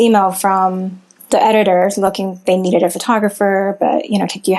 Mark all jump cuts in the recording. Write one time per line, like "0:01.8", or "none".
0:01.1